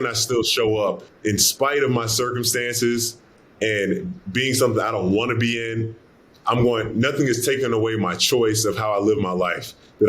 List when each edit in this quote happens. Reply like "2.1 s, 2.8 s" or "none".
1.1 s